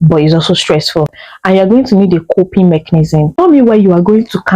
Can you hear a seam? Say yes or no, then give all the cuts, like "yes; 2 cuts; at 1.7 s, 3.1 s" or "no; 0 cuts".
yes; 1 cut; at 3.3 s